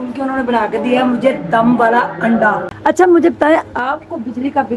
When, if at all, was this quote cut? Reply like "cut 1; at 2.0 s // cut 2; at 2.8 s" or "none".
cut 1; at 2.7 s